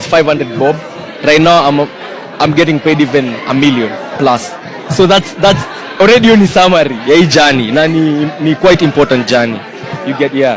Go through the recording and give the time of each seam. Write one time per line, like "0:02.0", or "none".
none